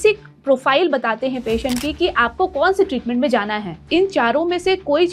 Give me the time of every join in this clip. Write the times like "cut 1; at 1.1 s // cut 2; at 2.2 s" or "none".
cut 1; at 3.8 s